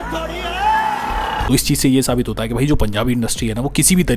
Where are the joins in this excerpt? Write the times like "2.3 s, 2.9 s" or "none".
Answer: none

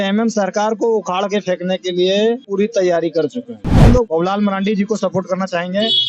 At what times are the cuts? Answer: 3.9 s

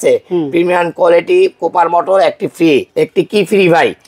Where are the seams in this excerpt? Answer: 2.9 s

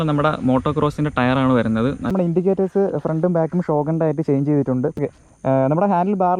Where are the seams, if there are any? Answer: 2.1 s, 5.0 s

